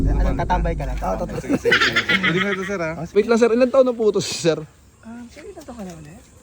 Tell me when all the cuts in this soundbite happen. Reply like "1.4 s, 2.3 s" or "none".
3.1 s